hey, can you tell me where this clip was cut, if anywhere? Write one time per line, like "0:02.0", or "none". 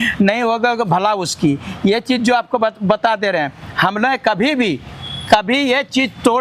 none